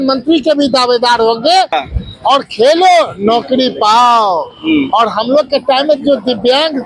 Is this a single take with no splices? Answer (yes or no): no